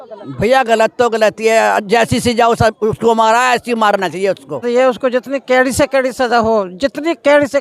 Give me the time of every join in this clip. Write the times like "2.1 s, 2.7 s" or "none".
4.6 s

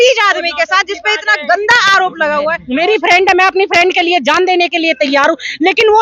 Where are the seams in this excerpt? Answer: 2.6 s

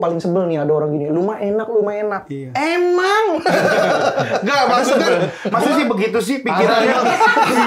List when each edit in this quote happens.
5.5 s

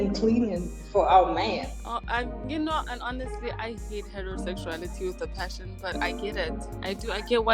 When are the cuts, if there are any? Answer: none

